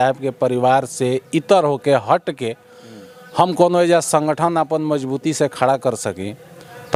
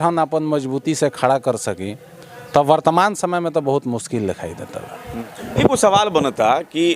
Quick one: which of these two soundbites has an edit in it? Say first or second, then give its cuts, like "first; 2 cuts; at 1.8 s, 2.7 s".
second; 1 cut; at 5.1 s